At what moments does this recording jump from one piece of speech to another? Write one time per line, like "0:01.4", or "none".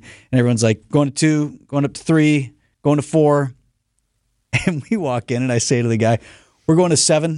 none